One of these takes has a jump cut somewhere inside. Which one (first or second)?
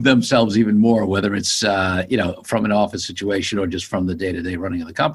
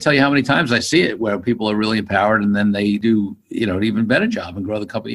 second